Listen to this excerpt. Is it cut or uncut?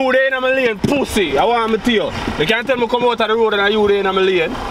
uncut